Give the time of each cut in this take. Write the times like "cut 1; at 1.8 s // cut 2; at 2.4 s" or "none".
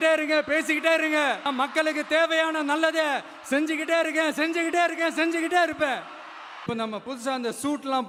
none